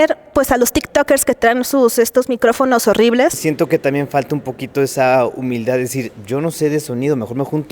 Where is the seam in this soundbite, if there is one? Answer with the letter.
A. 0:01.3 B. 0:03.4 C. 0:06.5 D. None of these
B